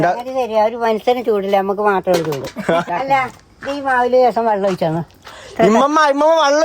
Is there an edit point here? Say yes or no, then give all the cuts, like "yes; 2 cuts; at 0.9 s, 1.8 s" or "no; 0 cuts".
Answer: yes; 1 cut; at 2.8 s